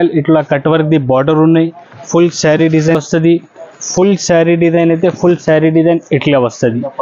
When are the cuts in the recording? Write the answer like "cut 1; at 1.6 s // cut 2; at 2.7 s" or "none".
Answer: cut 1; at 3.0 s